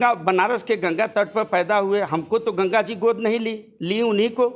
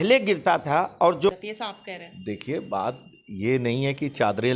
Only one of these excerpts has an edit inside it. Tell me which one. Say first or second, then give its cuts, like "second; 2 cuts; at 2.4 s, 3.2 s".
second; 1 cut; at 1.3 s